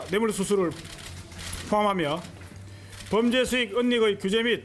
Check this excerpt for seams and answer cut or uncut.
cut